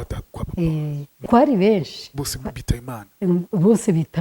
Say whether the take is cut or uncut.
cut